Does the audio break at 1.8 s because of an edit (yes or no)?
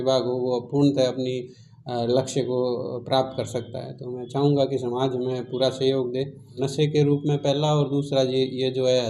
no